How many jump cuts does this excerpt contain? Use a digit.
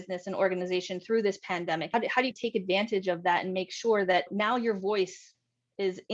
1